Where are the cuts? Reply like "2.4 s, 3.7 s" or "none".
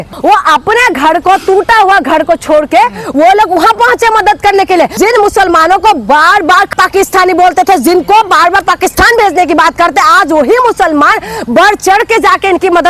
4.9 s